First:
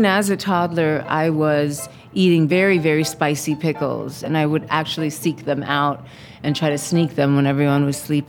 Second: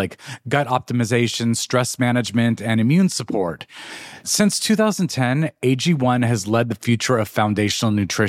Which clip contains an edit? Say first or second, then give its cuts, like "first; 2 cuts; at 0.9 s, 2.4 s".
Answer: first; 2 cuts; at 2.5 s, 4.2 s